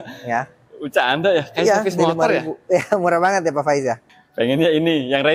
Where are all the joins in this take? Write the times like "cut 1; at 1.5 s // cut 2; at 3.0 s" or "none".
cut 1; at 4.1 s